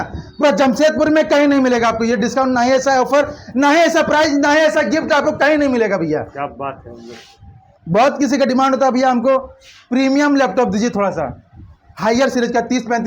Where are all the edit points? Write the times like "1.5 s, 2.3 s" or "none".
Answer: none

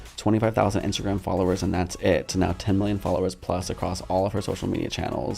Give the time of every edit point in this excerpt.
none

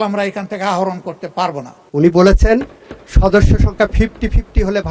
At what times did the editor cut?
1.8 s

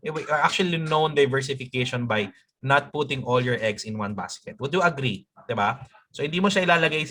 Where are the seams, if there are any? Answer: none

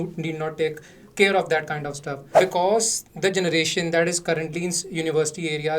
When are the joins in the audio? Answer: 2.2 s

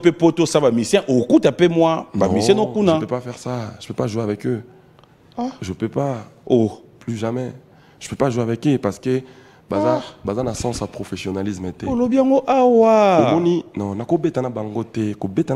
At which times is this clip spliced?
none

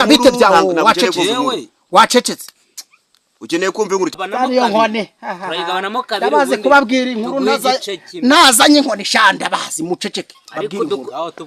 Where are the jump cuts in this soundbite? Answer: 4.1 s

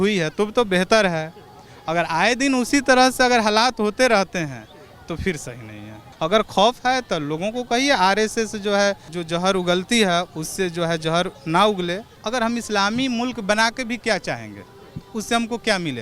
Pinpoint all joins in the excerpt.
6.0 s, 12.1 s

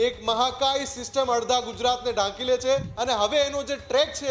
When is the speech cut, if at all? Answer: 2.9 s

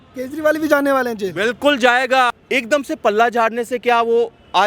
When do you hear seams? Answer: 2.4 s

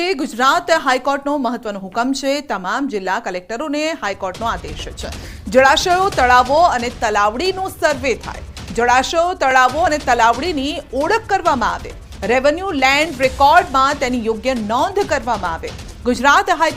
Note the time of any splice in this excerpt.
none

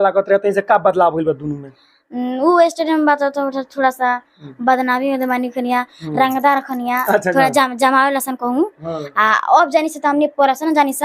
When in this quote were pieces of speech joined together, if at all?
none

